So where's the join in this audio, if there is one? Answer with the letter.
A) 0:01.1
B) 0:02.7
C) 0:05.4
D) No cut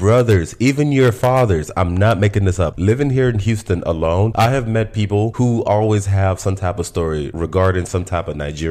B